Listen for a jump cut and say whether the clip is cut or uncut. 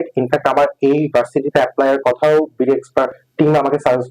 uncut